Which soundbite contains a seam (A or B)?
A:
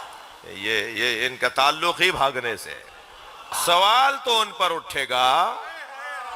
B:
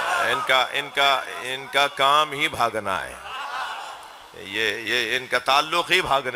A